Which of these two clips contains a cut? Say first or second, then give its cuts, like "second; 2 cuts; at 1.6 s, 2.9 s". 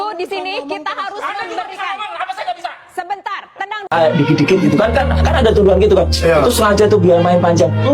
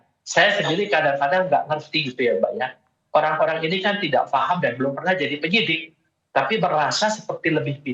first; 1 cut; at 3.9 s